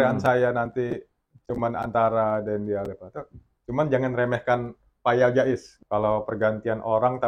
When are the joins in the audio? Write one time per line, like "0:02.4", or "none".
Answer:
0:05.7